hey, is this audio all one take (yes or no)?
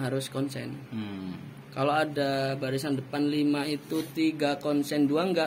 yes